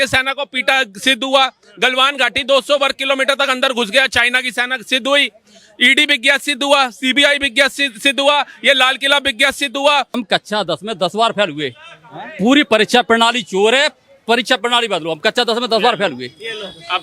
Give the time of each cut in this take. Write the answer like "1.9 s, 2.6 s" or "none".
10.2 s